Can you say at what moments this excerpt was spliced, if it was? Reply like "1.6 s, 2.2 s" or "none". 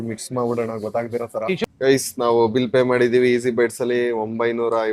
1.6 s